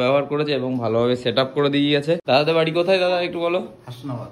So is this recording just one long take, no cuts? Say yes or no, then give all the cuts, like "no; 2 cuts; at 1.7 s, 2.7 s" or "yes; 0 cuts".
no; 1 cut; at 2.2 s